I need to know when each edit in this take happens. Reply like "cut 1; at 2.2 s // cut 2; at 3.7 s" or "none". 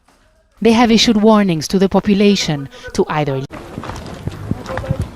cut 1; at 3.5 s

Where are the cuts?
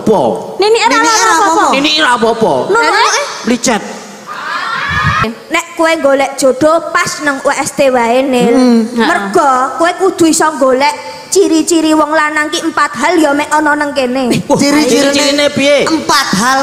cut 1; at 5.4 s

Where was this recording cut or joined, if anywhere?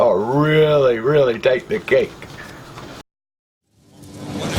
cut 1; at 3.0 s

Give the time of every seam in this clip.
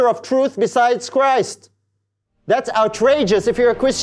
none

